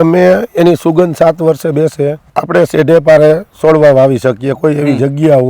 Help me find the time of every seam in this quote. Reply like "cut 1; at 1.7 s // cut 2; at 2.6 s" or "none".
cut 1; at 2.2 s